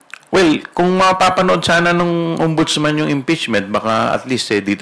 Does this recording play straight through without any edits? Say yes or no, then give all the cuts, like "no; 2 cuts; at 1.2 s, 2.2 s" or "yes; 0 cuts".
yes; 0 cuts